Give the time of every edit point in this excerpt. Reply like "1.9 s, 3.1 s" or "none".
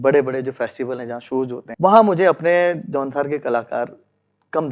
1.6 s